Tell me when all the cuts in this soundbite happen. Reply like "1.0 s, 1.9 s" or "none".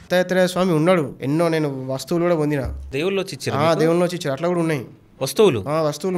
1.2 s, 2.8 s